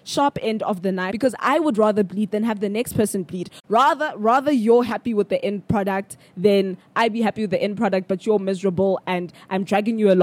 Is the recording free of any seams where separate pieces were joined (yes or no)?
no